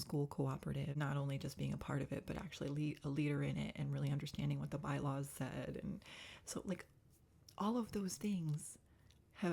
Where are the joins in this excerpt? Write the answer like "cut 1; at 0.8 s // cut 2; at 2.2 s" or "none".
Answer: cut 1; at 1.0 s